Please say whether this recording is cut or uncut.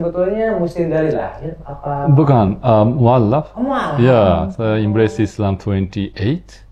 uncut